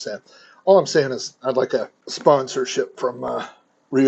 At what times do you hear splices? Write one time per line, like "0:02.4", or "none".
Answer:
0:02.0